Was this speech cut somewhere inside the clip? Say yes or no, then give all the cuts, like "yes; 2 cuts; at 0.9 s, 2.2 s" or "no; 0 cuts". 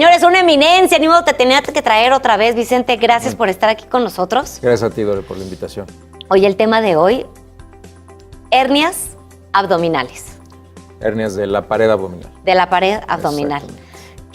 no; 0 cuts